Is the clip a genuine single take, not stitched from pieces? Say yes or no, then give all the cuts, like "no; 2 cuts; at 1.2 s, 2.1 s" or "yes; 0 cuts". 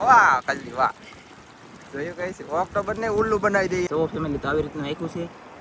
no; 1 cut; at 3.9 s